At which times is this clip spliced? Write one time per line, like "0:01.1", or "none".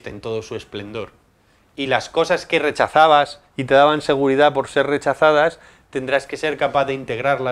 none